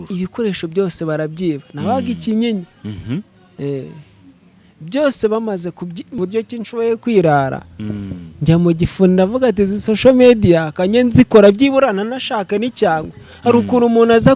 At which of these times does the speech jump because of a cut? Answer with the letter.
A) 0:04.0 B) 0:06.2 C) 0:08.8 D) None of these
B